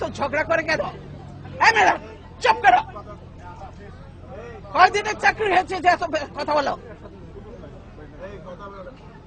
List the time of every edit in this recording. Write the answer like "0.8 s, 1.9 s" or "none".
none

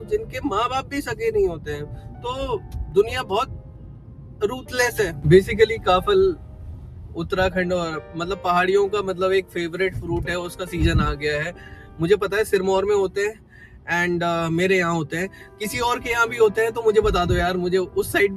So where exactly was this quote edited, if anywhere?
5.2 s

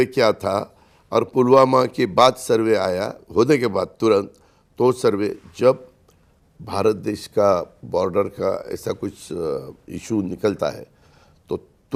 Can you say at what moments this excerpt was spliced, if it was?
none

